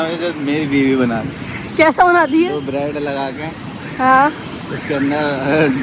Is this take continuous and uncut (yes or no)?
yes